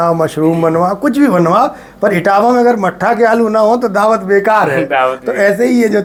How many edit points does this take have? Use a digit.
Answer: 0